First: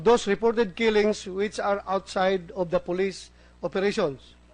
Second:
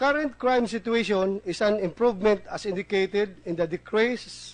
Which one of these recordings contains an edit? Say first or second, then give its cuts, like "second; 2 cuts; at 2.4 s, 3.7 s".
first; 1 cut; at 2.2 s